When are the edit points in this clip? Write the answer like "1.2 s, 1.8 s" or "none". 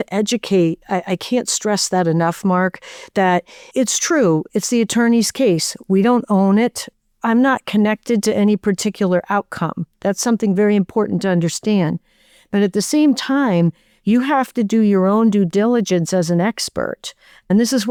none